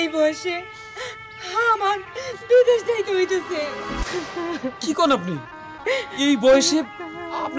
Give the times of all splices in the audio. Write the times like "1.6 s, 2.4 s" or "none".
none